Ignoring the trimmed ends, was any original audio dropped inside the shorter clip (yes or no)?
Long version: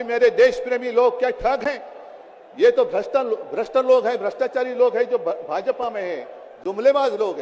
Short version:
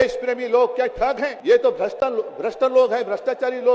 yes